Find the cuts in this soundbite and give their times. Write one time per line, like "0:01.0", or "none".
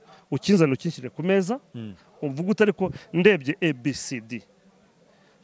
none